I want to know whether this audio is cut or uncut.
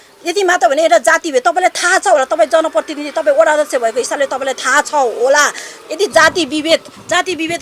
uncut